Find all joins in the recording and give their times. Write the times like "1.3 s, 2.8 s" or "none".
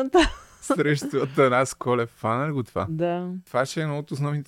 3.4 s